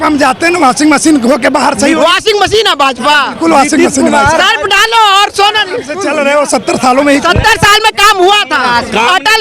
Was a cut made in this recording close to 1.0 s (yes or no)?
no